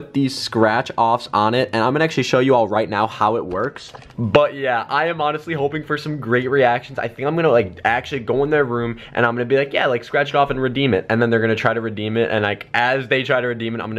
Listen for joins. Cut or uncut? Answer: uncut